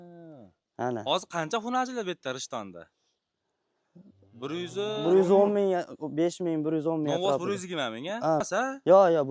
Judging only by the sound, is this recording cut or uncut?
cut